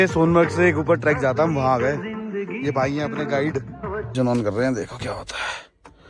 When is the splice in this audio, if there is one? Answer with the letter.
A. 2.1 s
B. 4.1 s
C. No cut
C